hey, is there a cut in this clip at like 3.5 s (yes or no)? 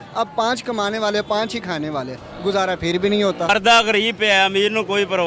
yes